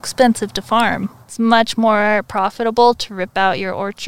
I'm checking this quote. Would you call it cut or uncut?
cut